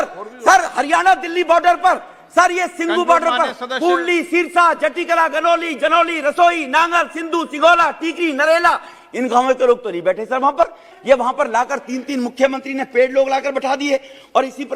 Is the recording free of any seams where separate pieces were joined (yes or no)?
no